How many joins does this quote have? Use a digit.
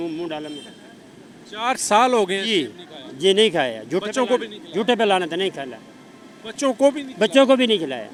0